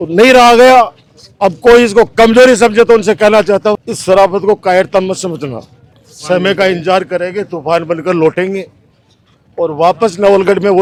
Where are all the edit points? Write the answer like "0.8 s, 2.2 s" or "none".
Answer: none